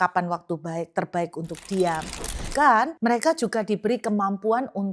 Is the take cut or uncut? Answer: cut